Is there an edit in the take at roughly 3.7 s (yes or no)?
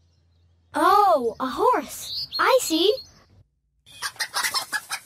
yes